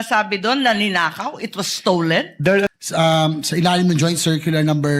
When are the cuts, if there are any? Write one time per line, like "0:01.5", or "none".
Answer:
0:02.7